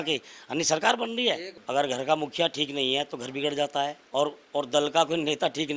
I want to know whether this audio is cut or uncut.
cut